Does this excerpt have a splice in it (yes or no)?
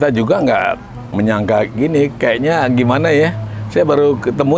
yes